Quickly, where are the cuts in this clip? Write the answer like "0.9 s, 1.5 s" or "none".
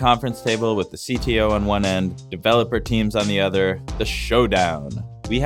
2.2 s